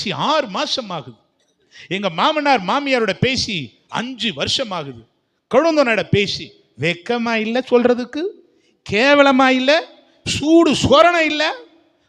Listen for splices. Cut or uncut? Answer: uncut